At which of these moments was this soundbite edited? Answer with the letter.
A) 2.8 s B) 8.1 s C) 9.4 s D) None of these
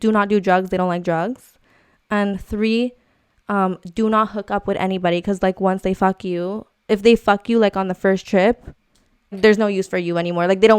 C